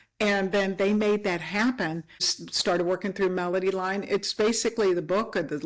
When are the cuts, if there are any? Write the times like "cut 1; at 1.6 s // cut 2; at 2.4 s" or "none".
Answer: cut 1; at 2.4 s